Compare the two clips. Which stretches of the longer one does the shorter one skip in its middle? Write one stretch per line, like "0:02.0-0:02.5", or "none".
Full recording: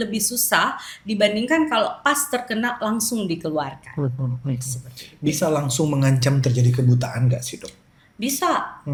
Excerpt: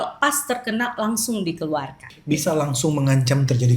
0:03.8-0:04.9